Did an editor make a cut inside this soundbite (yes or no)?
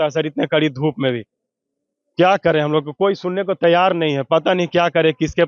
no